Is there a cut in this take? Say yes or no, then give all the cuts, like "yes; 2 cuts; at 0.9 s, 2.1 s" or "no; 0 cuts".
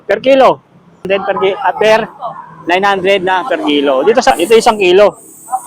yes; 2 cuts; at 1.1 s, 4.3 s